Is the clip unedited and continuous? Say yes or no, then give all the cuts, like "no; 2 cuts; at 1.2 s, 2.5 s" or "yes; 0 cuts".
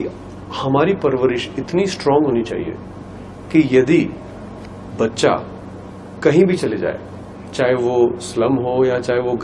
yes; 0 cuts